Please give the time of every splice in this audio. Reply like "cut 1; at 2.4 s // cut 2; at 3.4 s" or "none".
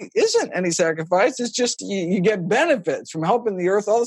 cut 1; at 1.7 s